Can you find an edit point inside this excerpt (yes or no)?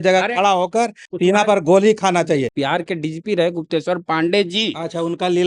yes